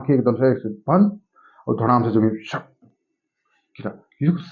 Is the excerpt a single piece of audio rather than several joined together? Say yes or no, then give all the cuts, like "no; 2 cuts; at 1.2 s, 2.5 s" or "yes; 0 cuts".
yes; 0 cuts